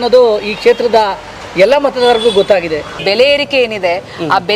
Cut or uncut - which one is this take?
cut